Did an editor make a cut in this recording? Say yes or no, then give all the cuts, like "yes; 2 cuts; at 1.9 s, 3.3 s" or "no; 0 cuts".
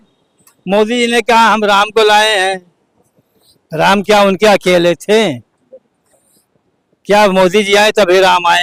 no; 0 cuts